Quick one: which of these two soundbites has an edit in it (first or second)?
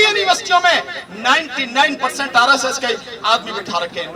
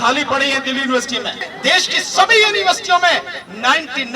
second